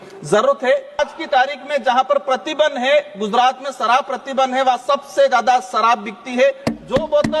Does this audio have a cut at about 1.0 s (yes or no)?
yes